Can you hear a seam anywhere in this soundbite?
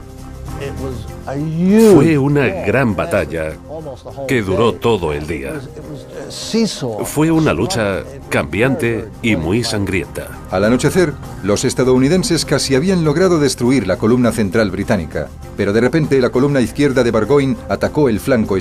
yes; 1 cut; at 2.9 s

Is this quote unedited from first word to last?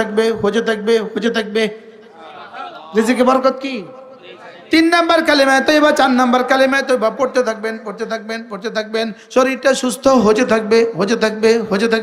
yes; 0 cuts

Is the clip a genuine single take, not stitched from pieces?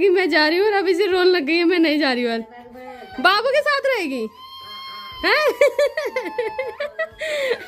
yes; 0 cuts

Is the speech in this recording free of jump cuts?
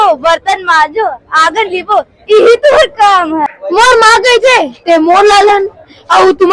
no; 1 cut; at 3.4 s

